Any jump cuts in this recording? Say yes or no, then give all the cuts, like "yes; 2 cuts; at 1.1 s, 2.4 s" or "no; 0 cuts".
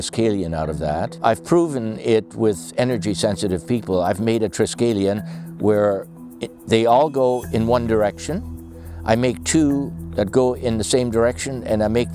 yes; 1 cut; at 1.1 s